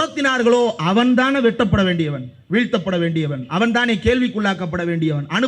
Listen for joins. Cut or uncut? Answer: uncut